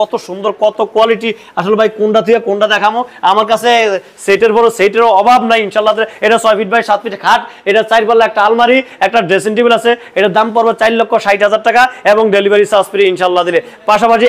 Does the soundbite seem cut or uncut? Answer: uncut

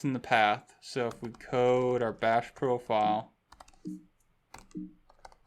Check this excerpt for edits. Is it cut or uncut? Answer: uncut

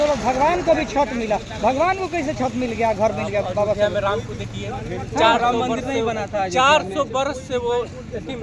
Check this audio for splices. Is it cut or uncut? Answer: uncut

